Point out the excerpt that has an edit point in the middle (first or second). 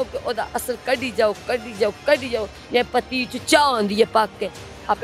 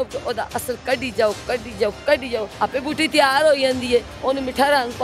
second